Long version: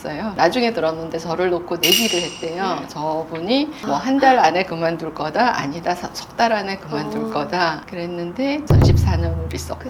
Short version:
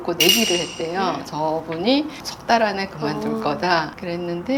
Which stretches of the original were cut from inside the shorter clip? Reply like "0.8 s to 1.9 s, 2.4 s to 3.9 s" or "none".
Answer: 3.8 s to 6.1 s